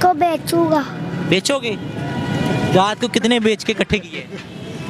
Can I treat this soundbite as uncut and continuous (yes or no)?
yes